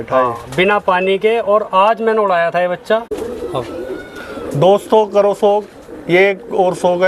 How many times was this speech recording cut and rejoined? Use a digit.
1